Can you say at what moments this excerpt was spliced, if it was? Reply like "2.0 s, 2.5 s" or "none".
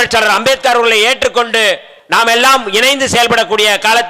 1.9 s